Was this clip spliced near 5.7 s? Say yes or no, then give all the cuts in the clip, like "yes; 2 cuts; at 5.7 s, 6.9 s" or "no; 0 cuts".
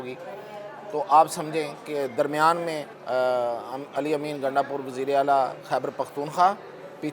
no; 1 cut; at 2.9 s